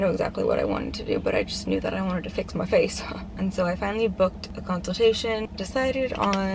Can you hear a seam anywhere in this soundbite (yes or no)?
yes